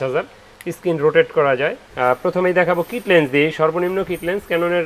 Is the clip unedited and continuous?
no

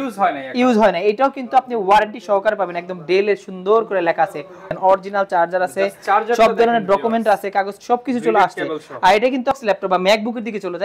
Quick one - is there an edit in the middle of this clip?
yes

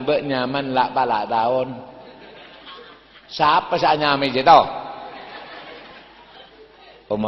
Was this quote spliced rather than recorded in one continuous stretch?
no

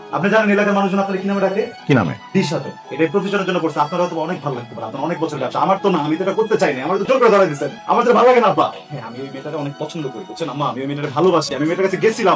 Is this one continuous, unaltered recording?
no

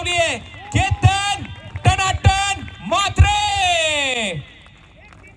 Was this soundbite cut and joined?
no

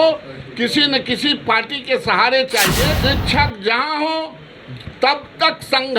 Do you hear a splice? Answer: yes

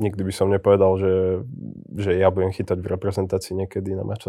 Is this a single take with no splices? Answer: yes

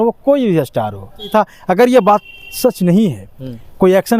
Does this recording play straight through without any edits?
no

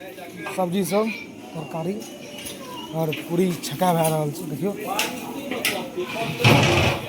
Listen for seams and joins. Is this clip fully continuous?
yes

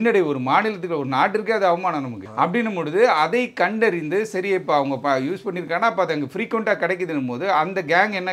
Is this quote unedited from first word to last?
yes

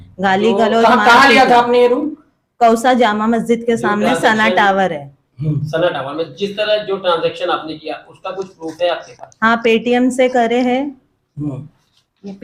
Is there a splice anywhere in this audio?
no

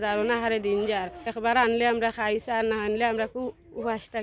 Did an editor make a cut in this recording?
yes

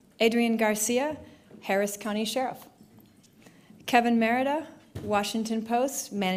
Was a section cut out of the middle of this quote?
no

